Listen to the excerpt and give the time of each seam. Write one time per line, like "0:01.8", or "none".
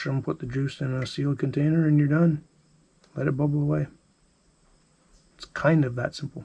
none